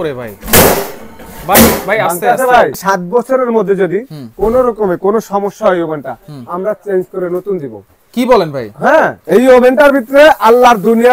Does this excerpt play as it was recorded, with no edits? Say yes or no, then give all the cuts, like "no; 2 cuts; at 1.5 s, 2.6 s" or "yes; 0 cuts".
no; 2 cuts; at 2.8 s, 9.2 s